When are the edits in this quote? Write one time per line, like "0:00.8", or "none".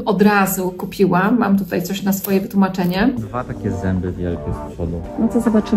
0:03.2